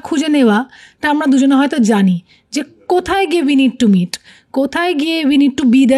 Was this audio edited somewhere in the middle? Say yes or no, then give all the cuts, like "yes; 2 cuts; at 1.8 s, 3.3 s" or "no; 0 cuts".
no; 0 cuts